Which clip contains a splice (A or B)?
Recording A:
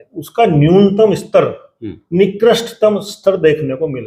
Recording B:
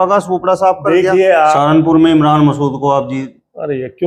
B